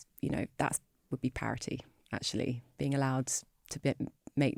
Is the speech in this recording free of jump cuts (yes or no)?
yes